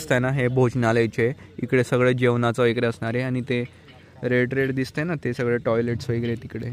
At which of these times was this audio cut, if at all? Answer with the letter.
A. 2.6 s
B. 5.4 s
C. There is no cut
C